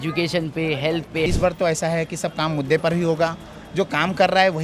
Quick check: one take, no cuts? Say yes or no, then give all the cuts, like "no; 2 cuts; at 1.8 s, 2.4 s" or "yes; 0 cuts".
no; 1 cut; at 1.3 s